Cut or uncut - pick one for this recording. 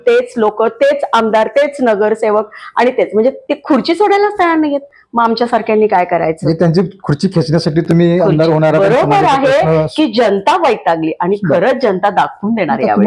uncut